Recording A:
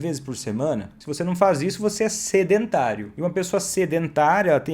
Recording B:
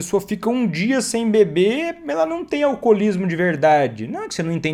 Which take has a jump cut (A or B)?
A